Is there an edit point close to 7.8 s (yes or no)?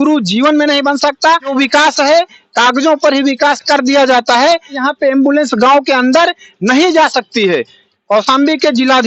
yes